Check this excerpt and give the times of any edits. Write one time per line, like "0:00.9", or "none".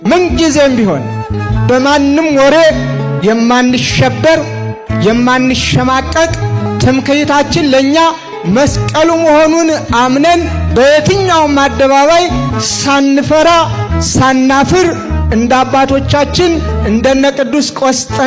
none